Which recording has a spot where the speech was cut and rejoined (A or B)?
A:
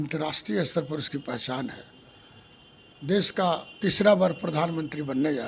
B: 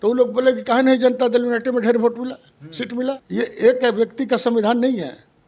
B